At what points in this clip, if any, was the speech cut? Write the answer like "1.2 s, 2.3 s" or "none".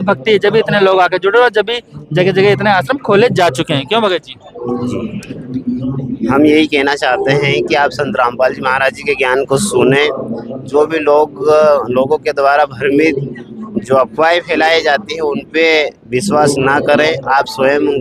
5.4 s